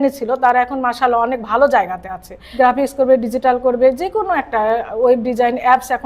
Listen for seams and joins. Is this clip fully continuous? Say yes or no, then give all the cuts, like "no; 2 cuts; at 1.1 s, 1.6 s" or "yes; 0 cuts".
no; 1 cut; at 2.4 s